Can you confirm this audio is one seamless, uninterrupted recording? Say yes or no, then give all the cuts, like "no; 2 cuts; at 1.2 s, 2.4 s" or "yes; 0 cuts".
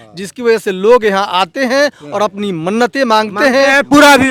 yes; 0 cuts